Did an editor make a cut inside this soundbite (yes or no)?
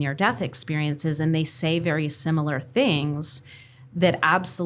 no